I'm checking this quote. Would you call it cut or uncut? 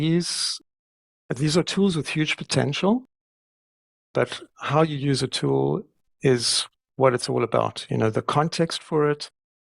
cut